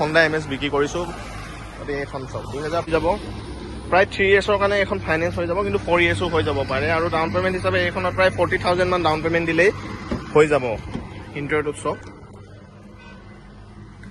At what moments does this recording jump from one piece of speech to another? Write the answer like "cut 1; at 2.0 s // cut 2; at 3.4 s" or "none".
cut 1; at 2.9 s